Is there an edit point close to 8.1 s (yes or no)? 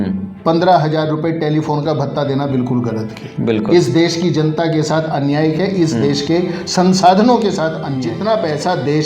yes